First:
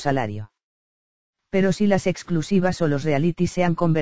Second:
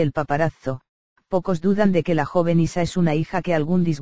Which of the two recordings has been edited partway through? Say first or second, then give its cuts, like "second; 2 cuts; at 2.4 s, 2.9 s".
first; 1 cut; at 1.9 s